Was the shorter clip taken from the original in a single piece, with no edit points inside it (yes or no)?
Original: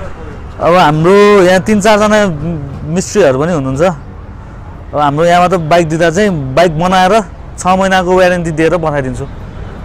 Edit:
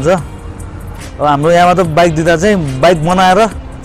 yes